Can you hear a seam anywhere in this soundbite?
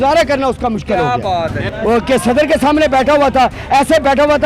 yes; 1 cut; at 1.6 s

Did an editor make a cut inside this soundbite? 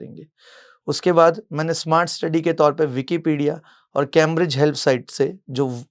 no; 0 cuts

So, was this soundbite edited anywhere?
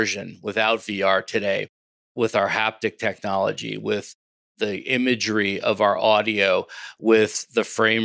no; 0 cuts

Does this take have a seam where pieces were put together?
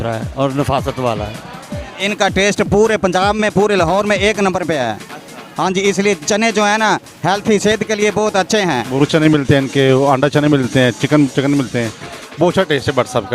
yes; 2 cuts; at 2.0 s, 8.9 s

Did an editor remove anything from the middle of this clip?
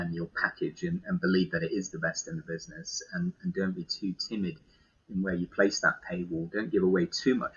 no; 0 cuts

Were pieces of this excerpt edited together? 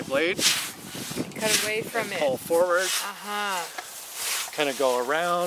no; 0 cuts

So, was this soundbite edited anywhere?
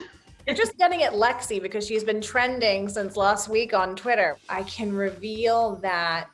yes; 1 cut; at 4.3 s

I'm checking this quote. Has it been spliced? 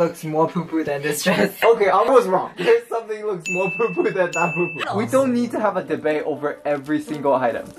yes; 3 cuts; at 1.6 s, 2.5 s, 4.8 s

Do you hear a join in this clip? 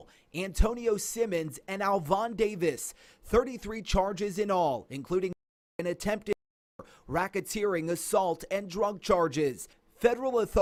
no; 0 cuts

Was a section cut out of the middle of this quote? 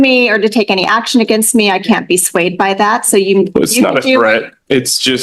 no; 0 cuts

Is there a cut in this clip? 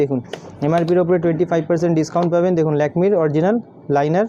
no; 0 cuts

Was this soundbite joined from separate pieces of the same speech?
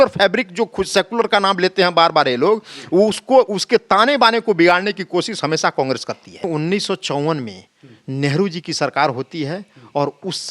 yes; 1 cut; at 6.5 s

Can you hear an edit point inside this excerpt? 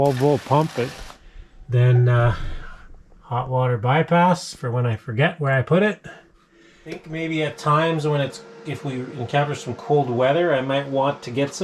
yes; 2 cuts; at 1.9 s, 7.1 s

